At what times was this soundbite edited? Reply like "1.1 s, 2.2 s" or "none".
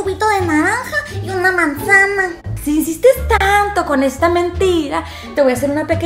2.5 s